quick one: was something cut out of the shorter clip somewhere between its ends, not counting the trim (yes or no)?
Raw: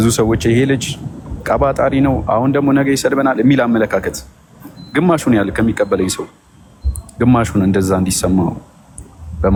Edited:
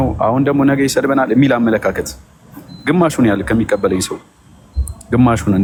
no